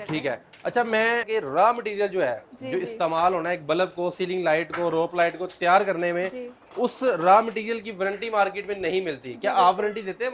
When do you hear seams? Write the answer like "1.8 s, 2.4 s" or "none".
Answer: 1.3 s